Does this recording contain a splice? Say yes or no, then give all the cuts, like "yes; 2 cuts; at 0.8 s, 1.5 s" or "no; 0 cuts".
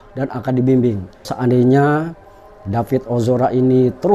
yes; 1 cut; at 1.3 s